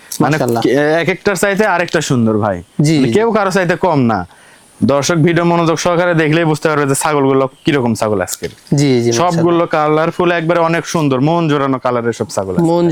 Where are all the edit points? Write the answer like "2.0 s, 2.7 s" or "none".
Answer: none